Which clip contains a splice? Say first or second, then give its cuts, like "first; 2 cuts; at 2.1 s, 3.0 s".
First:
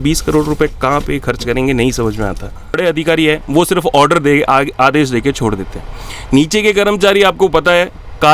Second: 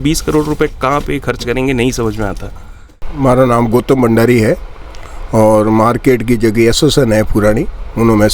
first; 1 cut; at 2.8 s